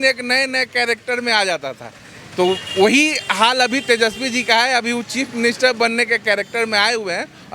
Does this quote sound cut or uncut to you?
uncut